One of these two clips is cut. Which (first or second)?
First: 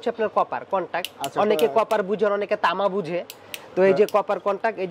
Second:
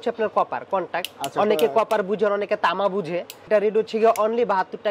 second